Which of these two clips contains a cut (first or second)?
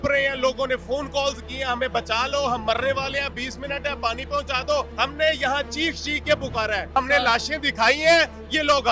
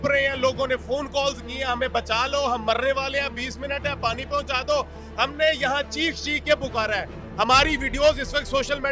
first